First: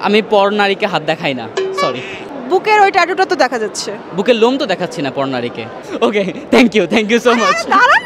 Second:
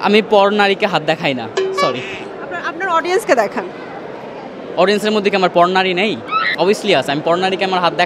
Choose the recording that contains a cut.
first; 2 cuts; at 2.3 s, 5.7 s

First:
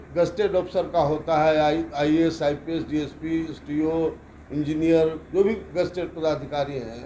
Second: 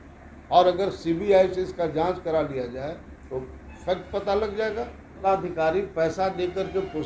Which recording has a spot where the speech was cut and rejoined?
second; 1 cut; at 5.1 s

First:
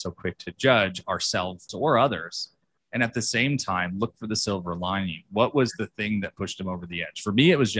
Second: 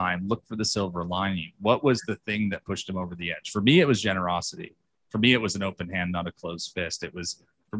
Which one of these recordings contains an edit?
first; 1 cut; at 1.7 s

